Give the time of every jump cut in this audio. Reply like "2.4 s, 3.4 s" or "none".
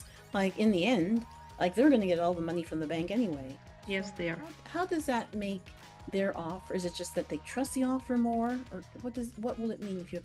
none